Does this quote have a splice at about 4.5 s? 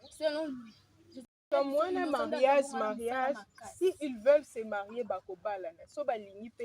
no; 1 cut; at 1.3 s

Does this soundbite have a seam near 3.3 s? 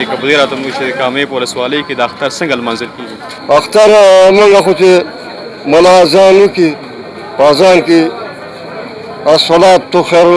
yes; 1 cut; at 3.3 s

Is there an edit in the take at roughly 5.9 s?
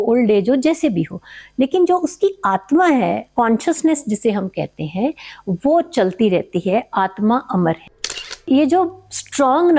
no; 1 cut; at 8.4 s

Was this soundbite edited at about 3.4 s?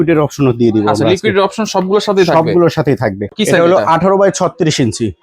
yes; 1 cut; at 3.4 s

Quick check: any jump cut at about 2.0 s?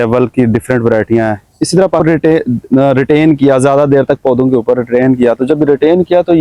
yes; 1 cut; at 2.0 s

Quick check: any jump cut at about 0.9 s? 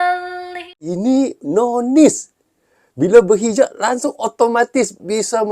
yes; 1 cut; at 0.9 s

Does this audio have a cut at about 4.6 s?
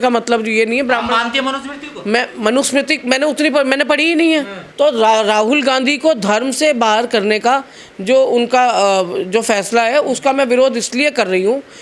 yes; 1 cut; at 4.6 s

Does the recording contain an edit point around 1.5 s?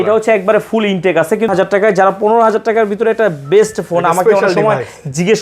yes; 1 cut; at 1.5 s

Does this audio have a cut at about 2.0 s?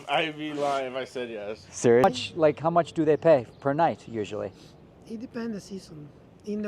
yes; 1 cut; at 2.0 s

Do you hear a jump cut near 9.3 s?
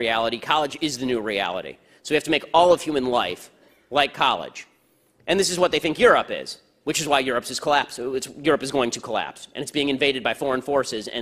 no; 0 cuts

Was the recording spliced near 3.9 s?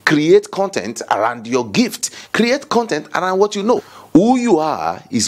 yes; 1 cut; at 3.9 s

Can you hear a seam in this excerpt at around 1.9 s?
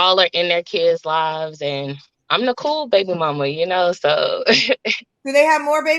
no; 1 cut; at 4.1 s

